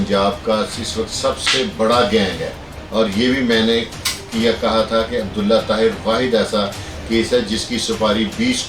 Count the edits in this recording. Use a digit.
1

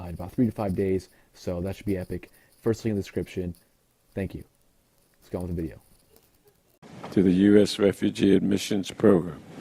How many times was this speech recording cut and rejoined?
0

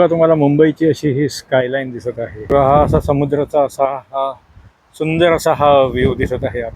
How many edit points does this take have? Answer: 1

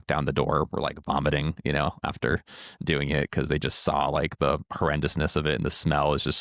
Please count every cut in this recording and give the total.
0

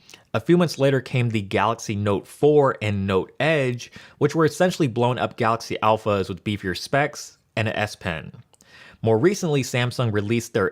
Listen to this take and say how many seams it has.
1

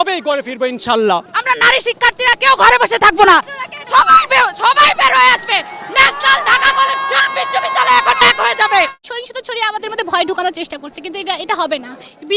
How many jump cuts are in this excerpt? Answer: 2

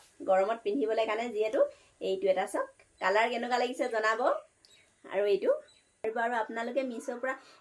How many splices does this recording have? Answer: 1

